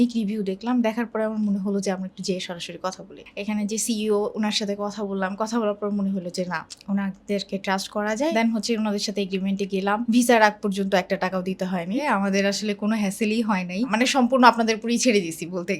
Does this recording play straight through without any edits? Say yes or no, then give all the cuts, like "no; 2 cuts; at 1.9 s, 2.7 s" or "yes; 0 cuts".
no; 4 cuts; at 3.2 s, 8.3 s, 10.0 s, 12.0 s